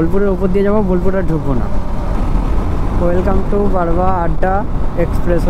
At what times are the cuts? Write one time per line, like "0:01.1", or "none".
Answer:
0:02.2